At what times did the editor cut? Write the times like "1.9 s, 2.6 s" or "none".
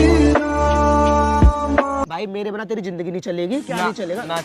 2.0 s